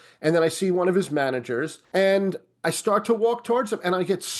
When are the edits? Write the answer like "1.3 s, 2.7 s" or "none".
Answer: 1.8 s